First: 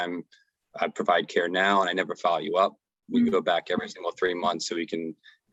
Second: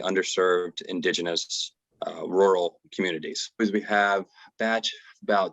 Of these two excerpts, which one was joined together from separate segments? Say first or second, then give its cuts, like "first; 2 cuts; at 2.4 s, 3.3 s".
second; 1 cut; at 3.6 s